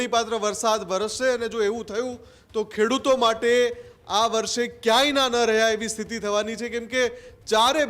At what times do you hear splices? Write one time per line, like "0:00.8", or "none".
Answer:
none